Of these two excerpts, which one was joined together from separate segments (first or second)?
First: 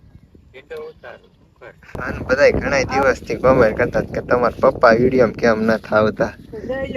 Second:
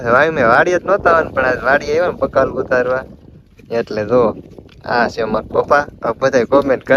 first